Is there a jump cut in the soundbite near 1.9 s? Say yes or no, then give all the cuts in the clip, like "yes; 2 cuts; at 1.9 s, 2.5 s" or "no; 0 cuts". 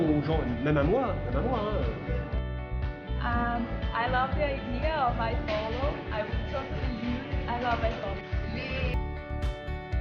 no; 1 cut; at 8.9 s